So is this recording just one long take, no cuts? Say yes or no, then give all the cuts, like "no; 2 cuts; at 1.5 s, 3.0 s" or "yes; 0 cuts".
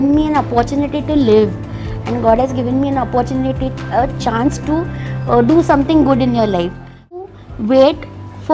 no; 1 cut; at 7.3 s